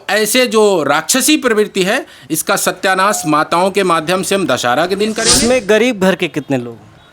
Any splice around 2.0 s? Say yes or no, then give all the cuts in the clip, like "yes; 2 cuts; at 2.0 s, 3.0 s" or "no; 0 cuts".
no; 1 cut; at 5.2 s